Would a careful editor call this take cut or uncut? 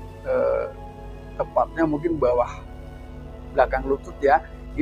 uncut